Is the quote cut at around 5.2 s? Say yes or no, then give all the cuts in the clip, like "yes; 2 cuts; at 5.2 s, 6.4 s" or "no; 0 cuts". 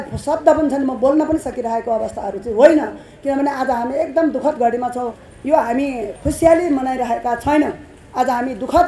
yes; 1 cut; at 5.2 s